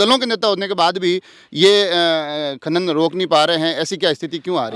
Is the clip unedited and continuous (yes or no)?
yes